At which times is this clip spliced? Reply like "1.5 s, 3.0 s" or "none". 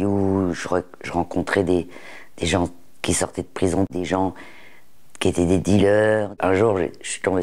3.9 s, 6.3 s